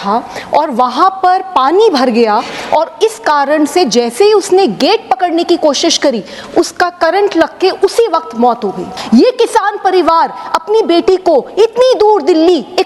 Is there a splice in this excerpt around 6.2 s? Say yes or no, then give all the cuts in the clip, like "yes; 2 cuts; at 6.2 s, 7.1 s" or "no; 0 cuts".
no; 1 cut; at 8.9 s